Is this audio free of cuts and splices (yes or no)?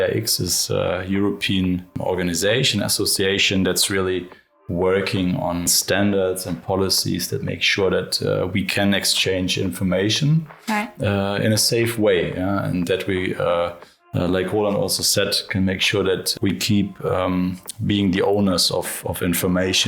no